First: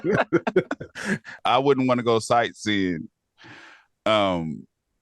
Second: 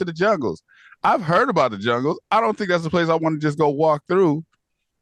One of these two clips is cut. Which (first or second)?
first